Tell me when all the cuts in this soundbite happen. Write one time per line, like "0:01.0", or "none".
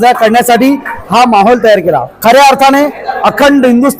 0:02.1

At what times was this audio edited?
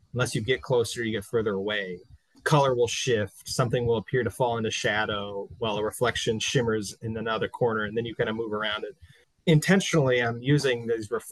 none

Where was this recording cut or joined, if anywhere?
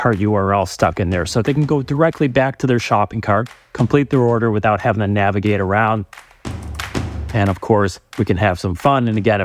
none

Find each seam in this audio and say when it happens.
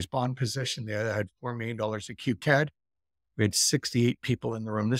none

